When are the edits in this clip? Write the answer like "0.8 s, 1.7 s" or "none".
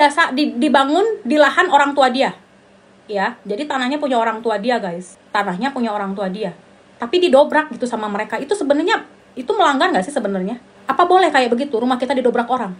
none